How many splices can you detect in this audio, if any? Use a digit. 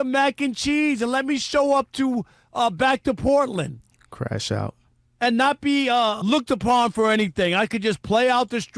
1